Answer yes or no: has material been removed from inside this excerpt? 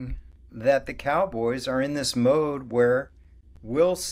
no